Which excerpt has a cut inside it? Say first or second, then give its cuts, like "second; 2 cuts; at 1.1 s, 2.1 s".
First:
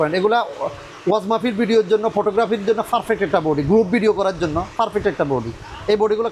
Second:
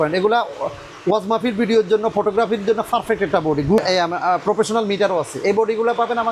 second; 1 cut; at 3.8 s